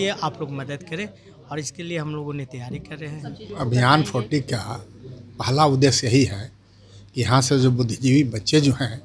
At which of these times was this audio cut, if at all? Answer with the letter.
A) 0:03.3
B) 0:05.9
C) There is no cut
A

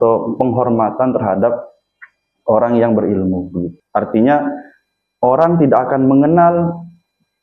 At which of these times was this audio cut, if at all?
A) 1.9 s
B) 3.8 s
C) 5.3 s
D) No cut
B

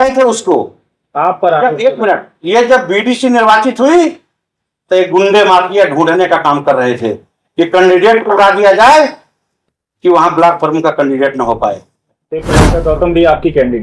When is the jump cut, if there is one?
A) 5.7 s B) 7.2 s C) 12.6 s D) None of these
C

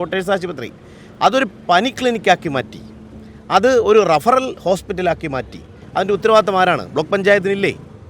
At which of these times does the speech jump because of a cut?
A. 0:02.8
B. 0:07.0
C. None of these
C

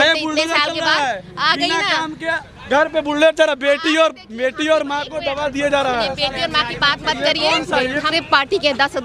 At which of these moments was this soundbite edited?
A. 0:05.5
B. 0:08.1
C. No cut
B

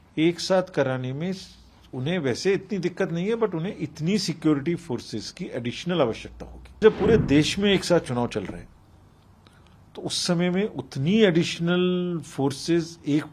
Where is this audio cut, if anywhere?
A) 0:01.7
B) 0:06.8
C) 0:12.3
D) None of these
B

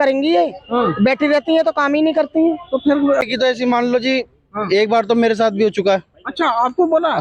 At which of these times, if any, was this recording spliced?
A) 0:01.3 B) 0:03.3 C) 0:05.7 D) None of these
B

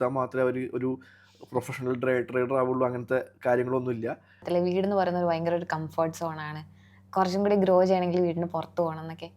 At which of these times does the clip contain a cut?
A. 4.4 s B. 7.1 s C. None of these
A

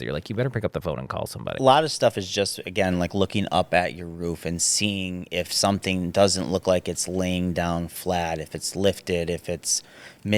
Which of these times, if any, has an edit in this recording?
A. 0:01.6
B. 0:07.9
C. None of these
A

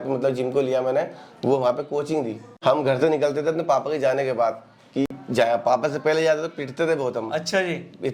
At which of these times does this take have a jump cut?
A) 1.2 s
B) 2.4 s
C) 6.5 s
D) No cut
B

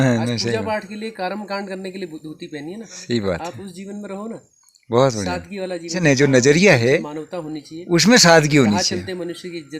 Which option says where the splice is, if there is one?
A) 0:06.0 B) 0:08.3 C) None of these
A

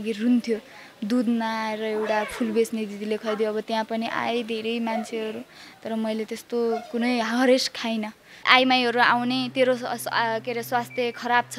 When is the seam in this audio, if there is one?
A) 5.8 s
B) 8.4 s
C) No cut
B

